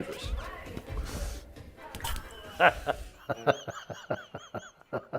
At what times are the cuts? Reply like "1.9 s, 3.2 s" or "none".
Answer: 2.5 s